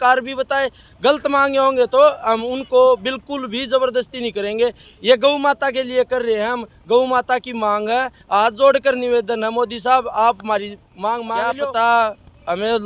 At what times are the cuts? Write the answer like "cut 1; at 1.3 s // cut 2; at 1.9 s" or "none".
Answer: cut 1; at 11.6 s